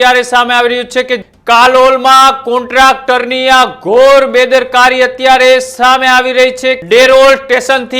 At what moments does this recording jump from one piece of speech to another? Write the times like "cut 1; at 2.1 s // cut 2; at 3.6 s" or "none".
cut 1; at 1.2 s // cut 2; at 6.8 s